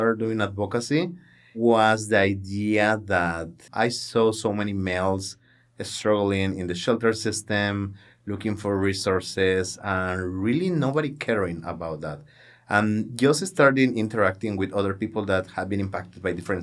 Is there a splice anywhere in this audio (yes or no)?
yes